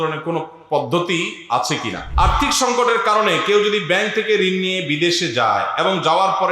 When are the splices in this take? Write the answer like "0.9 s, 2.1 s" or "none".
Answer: 2.0 s